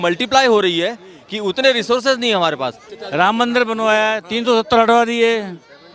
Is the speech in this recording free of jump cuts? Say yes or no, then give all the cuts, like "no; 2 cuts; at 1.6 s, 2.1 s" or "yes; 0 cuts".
no; 1 cut; at 2.9 s